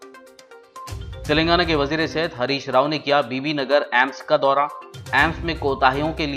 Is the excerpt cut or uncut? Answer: cut